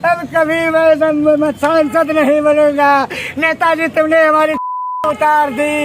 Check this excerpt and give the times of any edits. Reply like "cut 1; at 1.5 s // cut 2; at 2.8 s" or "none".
none